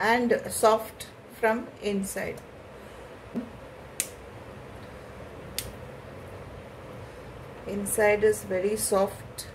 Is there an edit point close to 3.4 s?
yes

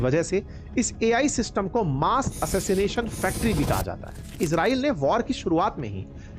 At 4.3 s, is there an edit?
yes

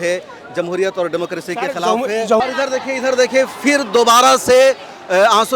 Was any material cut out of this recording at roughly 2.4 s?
yes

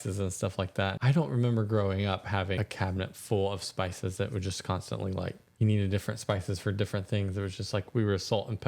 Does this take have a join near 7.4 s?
no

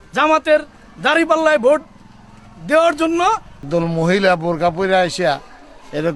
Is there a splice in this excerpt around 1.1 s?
no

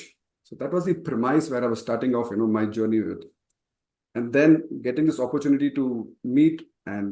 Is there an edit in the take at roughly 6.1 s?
yes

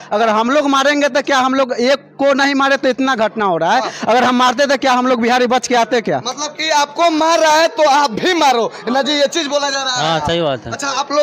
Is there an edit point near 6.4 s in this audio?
no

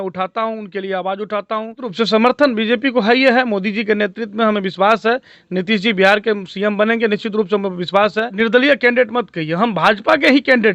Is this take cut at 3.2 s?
no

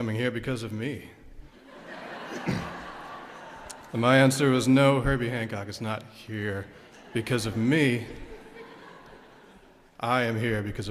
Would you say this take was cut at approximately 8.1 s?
no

